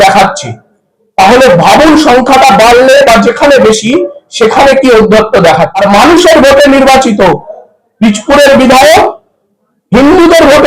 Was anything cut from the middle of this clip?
yes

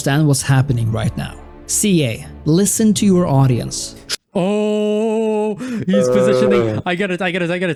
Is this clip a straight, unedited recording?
yes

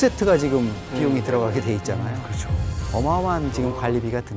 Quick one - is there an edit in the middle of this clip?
no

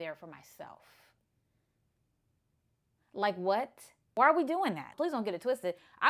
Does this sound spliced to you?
yes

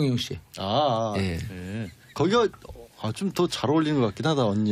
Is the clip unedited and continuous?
no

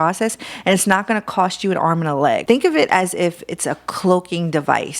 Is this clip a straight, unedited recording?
no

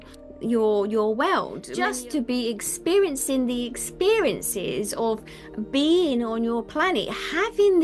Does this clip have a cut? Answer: yes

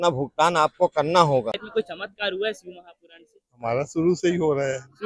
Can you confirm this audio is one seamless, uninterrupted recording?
no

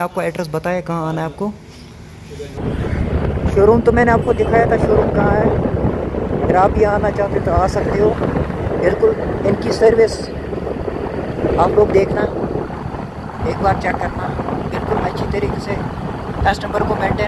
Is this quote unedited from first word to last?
yes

